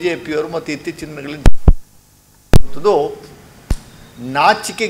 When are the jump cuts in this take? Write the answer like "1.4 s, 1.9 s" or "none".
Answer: none